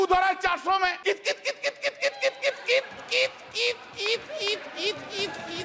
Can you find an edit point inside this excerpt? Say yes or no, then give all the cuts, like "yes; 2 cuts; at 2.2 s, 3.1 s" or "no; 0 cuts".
yes; 1 cut; at 1.0 s